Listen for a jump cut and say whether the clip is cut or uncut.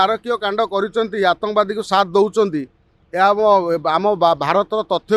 uncut